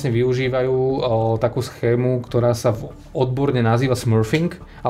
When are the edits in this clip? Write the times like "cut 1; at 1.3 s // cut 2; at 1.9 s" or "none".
none